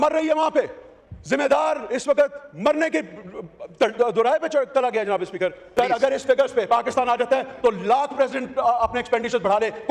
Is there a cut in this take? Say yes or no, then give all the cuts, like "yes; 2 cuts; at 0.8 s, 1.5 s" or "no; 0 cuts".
yes; 1 cut; at 5.6 s